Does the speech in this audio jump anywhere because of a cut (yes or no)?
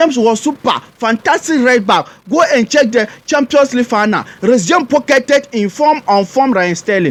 no